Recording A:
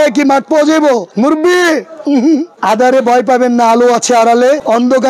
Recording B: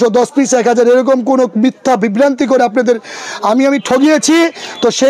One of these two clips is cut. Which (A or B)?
A